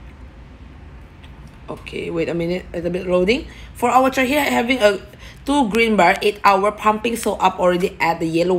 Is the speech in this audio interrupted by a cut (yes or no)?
no